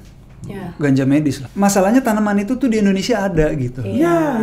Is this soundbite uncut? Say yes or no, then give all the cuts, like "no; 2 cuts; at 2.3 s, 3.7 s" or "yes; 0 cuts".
no; 1 cut; at 1.5 s